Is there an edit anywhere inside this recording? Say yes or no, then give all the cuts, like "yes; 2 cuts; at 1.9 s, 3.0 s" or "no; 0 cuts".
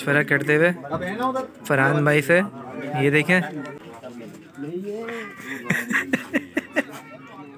yes; 1 cut; at 3.7 s